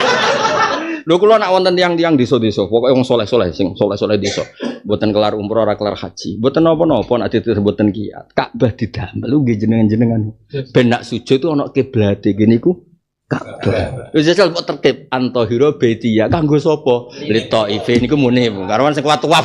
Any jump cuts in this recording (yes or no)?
no